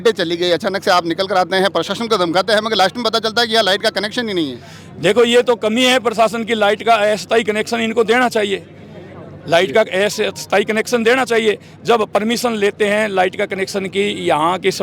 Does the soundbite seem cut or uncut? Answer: uncut